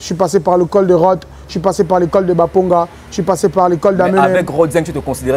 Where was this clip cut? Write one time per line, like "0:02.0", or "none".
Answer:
none

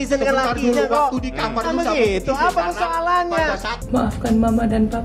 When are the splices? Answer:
0:03.7

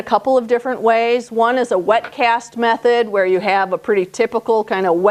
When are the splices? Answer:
none

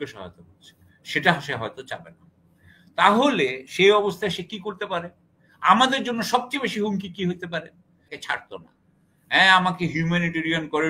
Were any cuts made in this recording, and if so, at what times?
0:08.2

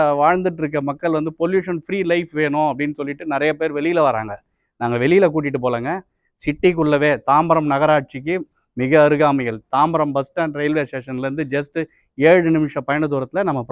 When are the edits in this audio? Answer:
none

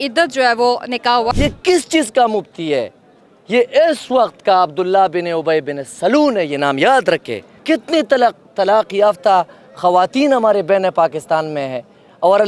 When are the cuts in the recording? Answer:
0:01.3
0:07.5

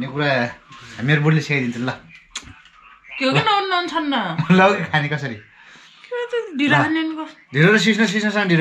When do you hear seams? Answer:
none

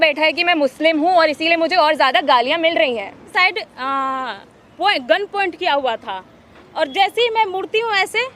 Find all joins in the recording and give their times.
0:03.3

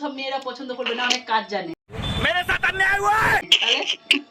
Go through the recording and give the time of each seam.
none

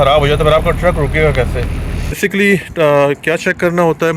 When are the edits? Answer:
0:02.2

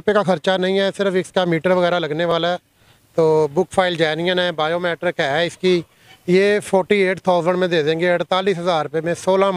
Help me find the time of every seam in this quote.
none

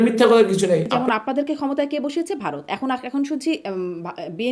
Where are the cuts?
0:00.9

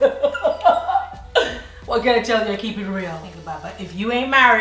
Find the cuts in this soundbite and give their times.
none

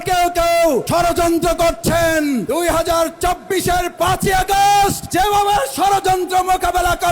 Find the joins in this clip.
0:00.9
0:02.4
0:05.0

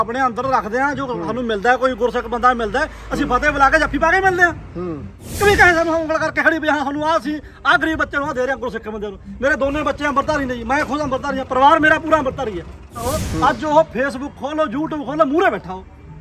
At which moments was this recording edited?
0:05.4
0:13.1

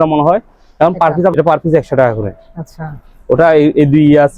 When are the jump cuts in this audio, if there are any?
0:01.3

